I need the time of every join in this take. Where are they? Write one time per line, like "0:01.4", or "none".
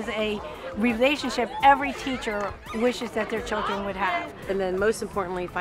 0:04.4